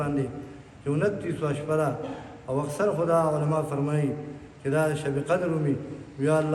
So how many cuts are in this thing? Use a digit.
0